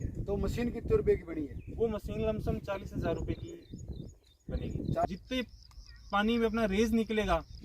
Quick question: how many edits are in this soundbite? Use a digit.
1